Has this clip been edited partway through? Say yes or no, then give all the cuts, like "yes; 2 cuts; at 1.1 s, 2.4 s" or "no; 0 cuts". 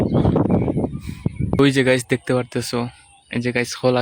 yes; 1 cut; at 1.6 s